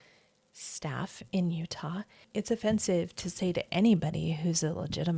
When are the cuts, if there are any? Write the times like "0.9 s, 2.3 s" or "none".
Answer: 2.2 s